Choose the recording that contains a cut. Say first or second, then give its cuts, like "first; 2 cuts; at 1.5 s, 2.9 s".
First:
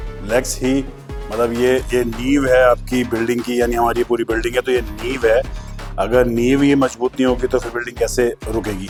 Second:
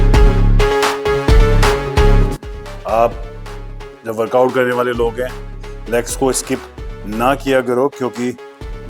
second; 1 cut; at 2.3 s